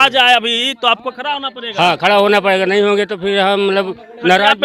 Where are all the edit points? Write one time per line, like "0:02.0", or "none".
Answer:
none